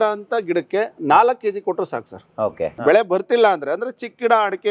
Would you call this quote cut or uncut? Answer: cut